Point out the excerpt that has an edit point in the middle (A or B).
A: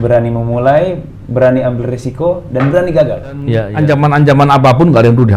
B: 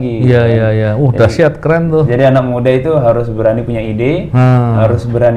A